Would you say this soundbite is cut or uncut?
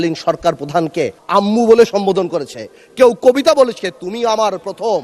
cut